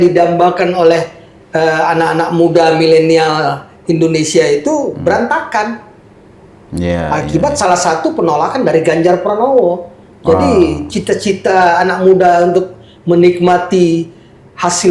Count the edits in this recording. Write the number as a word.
zero